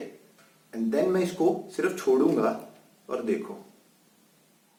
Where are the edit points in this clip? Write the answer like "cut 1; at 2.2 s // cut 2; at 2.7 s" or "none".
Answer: none